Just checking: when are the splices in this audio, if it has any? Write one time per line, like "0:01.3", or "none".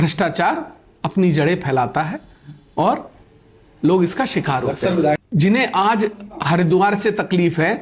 0:05.2